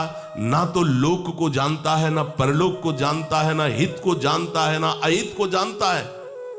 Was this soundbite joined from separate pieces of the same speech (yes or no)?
no